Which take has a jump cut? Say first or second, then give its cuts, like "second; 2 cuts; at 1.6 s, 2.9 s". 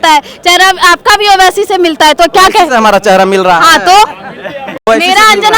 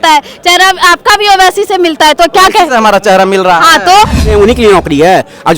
second; 1 cut; at 4.3 s